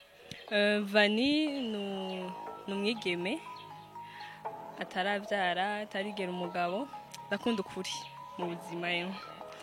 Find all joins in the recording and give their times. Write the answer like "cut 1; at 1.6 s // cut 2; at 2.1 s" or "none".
cut 1; at 7.1 s